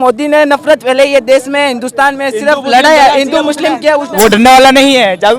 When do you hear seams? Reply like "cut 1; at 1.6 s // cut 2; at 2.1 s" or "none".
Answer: cut 1; at 4.1 s